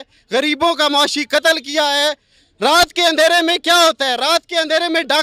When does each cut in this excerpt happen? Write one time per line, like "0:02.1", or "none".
none